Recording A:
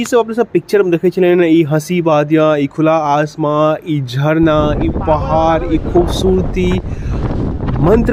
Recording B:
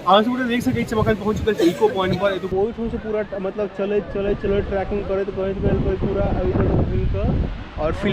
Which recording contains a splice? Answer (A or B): B